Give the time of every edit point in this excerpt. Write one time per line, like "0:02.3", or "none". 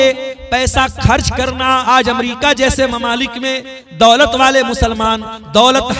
0:01.9